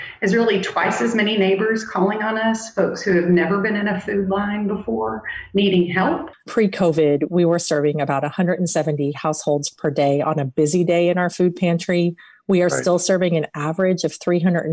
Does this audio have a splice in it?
yes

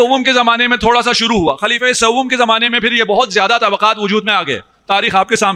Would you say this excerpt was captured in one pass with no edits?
yes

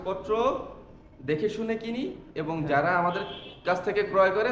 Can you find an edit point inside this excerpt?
no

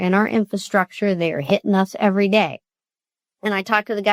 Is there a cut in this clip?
no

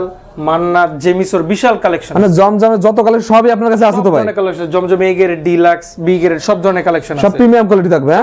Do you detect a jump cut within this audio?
no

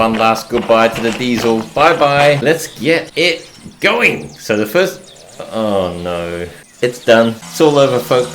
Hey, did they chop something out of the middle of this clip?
yes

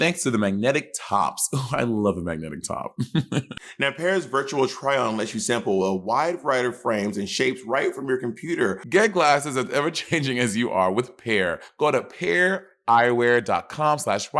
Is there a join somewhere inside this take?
yes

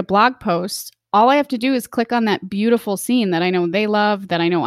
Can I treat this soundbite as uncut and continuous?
yes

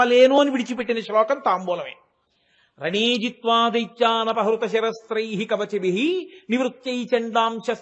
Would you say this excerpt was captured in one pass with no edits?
yes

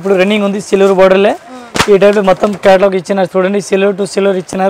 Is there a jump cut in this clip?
no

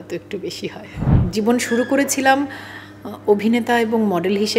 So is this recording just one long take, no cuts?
no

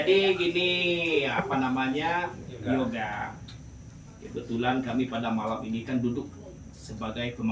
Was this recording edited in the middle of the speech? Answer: no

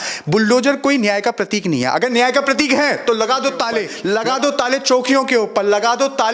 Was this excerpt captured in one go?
no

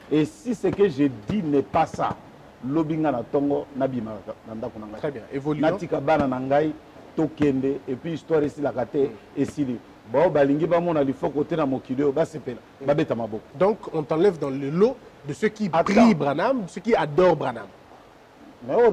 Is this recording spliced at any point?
yes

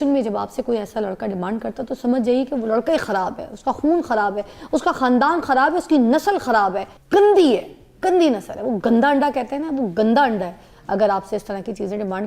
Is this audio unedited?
no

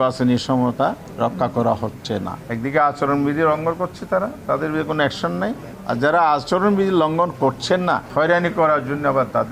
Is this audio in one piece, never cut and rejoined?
no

